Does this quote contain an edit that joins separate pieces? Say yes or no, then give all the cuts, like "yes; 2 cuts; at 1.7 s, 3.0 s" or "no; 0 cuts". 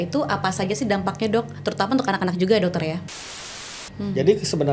yes; 1 cut; at 3.5 s